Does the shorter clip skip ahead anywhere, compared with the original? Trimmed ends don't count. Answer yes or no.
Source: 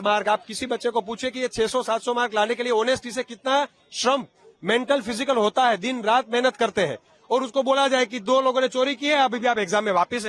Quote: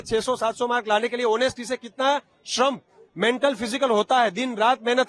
no